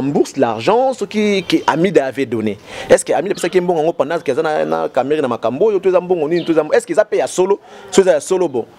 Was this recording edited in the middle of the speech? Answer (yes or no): yes